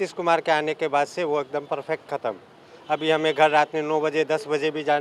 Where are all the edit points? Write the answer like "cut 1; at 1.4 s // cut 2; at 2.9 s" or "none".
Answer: none